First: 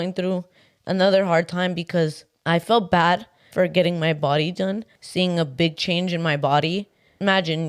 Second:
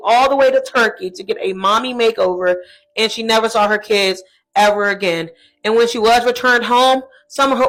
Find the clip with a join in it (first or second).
first